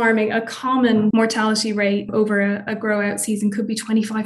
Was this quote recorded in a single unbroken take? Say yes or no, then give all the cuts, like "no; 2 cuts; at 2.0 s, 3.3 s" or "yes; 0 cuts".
no; 2 cuts; at 1.1 s, 2.1 s